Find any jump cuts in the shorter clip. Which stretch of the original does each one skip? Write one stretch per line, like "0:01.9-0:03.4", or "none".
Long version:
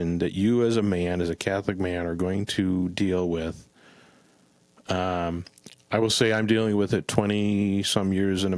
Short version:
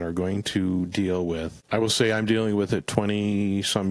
0:03.6-0:05.8

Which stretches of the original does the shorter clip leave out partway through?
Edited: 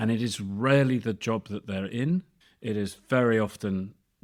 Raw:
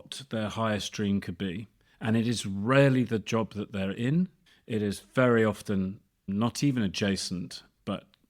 none

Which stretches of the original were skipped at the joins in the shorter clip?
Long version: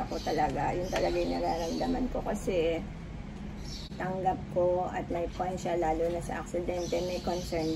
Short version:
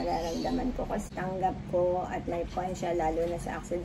0:02.4-0:03.9

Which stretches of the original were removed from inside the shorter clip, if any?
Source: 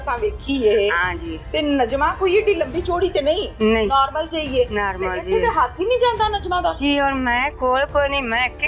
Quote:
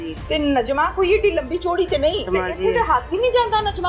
0:03.5-0:04.9

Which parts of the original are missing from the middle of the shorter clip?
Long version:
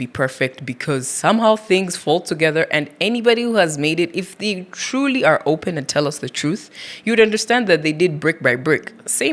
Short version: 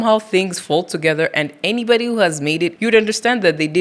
0:04.1-0:07.0

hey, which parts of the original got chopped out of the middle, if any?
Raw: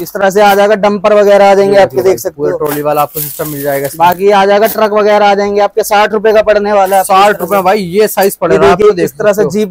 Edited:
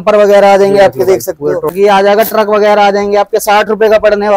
0:02.7-0:04.2

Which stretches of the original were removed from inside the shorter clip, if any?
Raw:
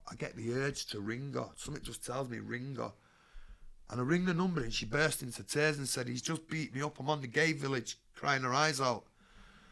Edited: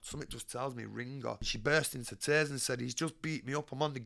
0:03.0-0:04.8

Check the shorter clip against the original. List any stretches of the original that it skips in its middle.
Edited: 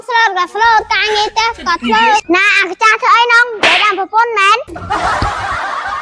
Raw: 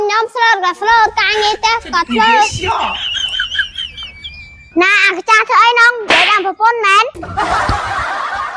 0:02.5-0:04.7

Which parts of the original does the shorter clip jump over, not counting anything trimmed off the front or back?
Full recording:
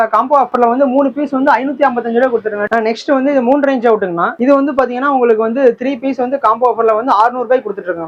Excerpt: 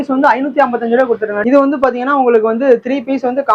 0:02.6-0:04.3

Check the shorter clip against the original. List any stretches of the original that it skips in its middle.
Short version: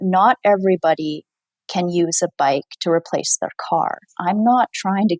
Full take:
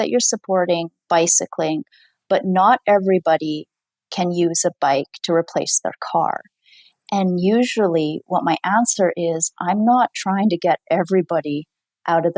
0:06.5-0:09.5

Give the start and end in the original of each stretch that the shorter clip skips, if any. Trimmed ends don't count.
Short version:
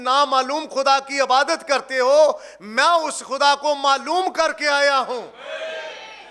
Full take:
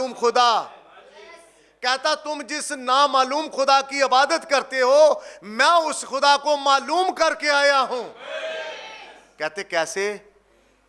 none

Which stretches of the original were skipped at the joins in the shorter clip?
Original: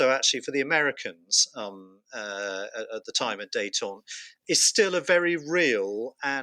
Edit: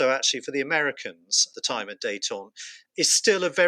0:01.5-0:03.0

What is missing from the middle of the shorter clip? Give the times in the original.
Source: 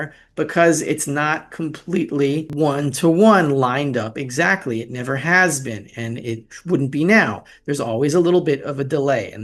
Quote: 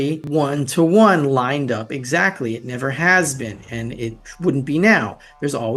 none

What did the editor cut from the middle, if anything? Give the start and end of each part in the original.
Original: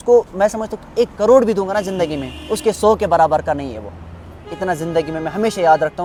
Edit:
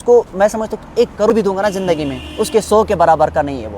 0:01.3-0:01.4

